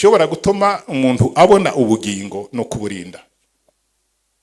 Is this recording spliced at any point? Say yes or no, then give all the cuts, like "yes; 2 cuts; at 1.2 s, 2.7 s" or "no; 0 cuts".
no; 0 cuts